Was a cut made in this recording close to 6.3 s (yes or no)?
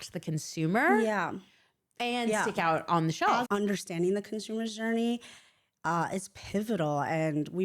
no